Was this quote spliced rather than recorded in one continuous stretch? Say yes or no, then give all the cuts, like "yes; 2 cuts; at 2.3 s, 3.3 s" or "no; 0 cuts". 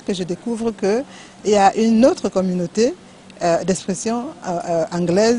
no; 0 cuts